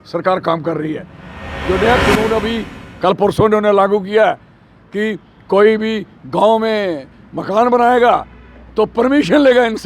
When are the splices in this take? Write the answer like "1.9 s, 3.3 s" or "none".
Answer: 1.4 s